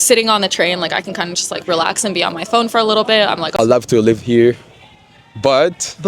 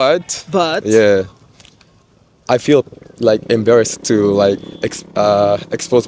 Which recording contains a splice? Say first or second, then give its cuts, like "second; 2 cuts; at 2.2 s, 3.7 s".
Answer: first; 1 cut; at 3.6 s